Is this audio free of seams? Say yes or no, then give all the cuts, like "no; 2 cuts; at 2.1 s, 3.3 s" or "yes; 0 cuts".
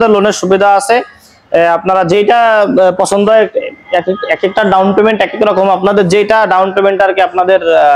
yes; 0 cuts